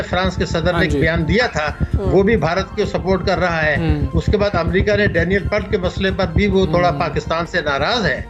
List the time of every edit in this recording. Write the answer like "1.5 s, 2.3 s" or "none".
none